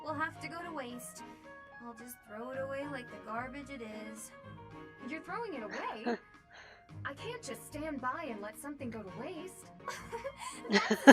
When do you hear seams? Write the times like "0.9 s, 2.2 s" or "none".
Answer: 9.7 s